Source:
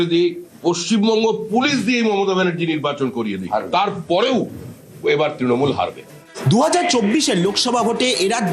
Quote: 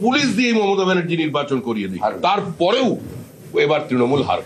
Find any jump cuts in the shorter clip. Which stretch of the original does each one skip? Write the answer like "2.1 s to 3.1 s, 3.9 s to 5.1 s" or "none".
none